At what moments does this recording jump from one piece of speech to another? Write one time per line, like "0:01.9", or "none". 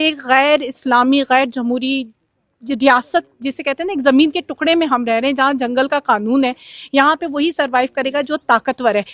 none